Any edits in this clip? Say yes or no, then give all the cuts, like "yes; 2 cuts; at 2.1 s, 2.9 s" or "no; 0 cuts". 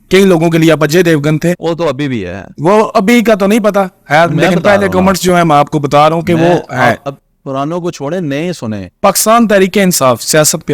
yes; 1 cut; at 8.9 s